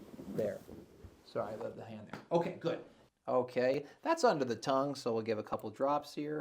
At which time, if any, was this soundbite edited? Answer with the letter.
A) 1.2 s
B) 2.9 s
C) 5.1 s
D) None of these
B